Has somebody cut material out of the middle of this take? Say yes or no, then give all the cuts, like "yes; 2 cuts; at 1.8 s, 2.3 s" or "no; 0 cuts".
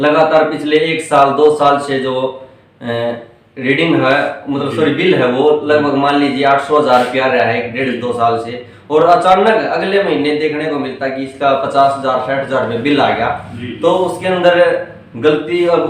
no; 0 cuts